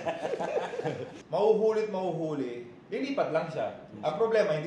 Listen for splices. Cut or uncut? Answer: cut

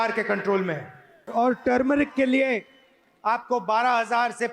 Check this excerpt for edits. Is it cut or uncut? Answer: cut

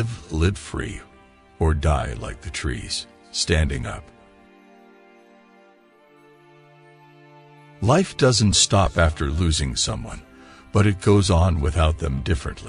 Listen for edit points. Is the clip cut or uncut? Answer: cut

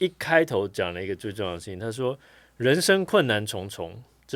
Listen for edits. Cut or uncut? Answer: uncut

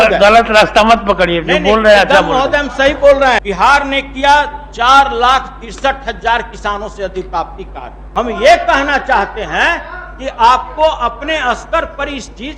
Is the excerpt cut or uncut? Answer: cut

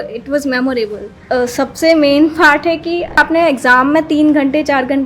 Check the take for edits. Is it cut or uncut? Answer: cut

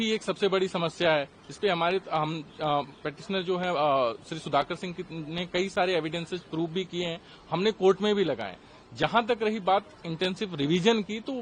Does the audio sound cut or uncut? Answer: uncut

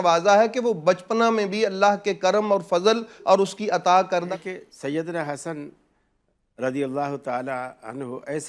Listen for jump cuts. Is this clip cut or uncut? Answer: cut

